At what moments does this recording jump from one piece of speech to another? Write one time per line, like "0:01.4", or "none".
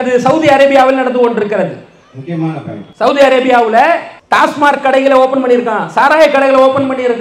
0:02.8
0:04.1